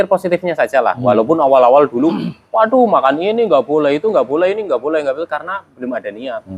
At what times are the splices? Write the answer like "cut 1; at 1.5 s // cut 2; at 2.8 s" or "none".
none